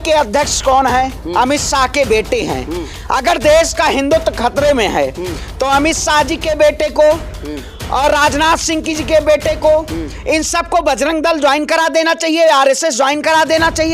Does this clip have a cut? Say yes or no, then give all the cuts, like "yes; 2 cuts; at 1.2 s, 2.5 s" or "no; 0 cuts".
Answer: no; 0 cuts